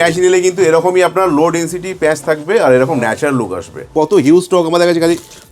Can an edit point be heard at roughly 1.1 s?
no; 1 cut; at 3.9 s

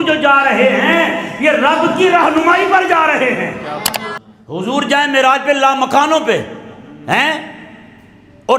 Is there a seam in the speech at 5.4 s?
no; 1 cut; at 4.0 s

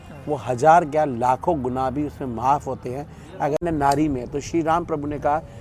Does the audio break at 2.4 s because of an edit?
no; 1 cut; at 3.6 s

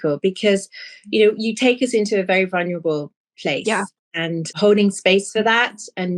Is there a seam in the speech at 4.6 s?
yes; 1 cut; at 4.6 s

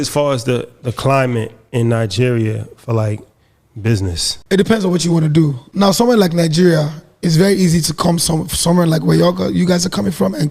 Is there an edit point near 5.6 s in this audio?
yes; 2 cuts; at 4.3 s, 5.6 s

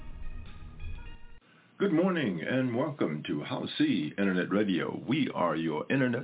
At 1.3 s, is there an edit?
yes; 1 cut; at 1.3 s

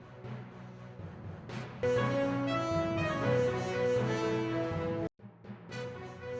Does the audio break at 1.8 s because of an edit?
yes; 1 cut; at 1.8 s

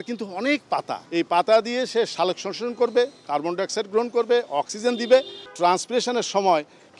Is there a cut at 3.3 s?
no; 2 cuts; at 1.0 s, 5.4 s

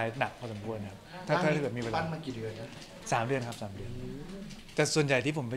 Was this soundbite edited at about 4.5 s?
yes; 1 cut; at 4.5 s

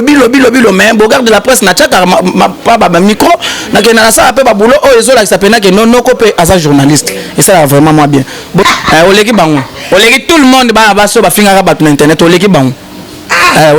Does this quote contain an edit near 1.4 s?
no; 1 cut; at 8.6 s

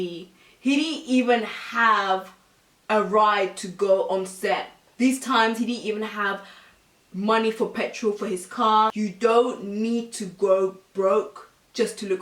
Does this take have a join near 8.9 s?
yes; 2 cuts; at 4.8 s, 8.9 s

